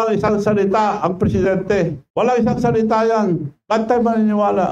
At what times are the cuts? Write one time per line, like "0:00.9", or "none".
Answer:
0:02.0